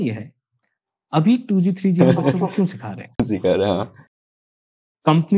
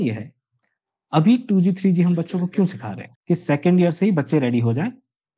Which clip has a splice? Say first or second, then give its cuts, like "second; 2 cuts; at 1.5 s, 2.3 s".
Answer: second; 1 cut; at 3.1 s